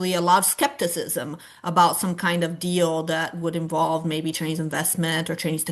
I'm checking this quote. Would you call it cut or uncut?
uncut